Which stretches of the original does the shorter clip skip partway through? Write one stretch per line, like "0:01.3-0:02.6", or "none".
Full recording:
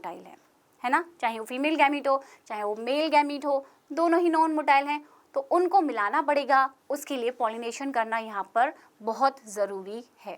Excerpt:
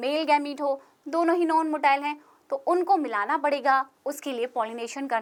none